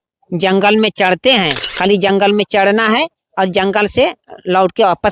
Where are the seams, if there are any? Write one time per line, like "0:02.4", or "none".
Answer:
0:01.6